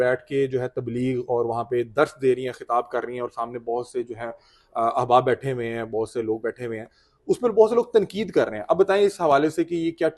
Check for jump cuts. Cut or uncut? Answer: uncut